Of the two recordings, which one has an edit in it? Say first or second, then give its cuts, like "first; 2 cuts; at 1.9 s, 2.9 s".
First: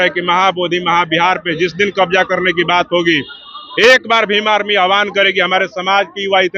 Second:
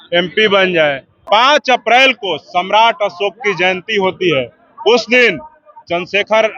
second; 1 cut; at 1.2 s